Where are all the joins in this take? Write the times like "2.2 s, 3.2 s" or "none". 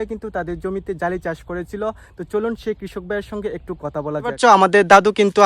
none